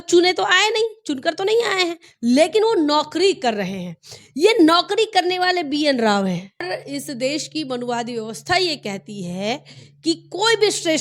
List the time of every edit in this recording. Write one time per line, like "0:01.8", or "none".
0:06.8